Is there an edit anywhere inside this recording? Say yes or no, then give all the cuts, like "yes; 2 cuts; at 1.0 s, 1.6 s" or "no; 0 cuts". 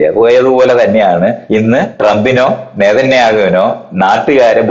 yes; 1 cut; at 1.7 s